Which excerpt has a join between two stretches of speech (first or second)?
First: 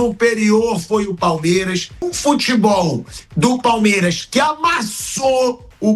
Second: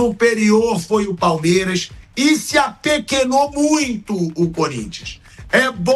first